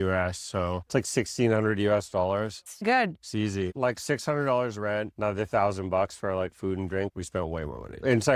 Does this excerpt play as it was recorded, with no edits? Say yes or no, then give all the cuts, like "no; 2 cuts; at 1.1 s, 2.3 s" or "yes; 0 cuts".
yes; 0 cuts